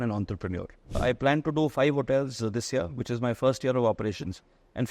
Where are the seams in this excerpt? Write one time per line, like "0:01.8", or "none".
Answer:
0:01.0